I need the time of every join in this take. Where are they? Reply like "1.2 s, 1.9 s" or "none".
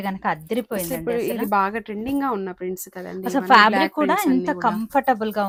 none